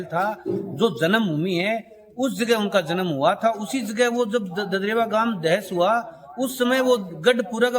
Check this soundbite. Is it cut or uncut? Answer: uncut